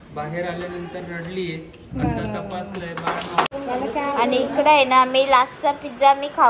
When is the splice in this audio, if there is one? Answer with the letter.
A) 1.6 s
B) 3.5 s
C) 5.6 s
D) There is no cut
B